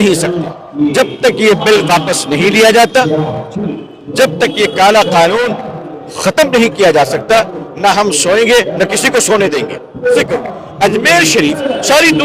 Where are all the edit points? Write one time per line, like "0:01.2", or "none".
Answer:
0:10.2

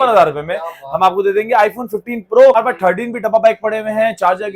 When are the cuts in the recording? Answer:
0:02.5

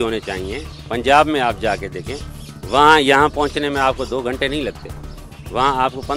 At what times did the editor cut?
none

